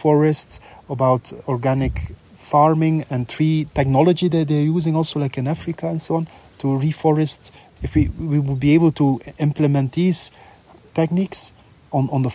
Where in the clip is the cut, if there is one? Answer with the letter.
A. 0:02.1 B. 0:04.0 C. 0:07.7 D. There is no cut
C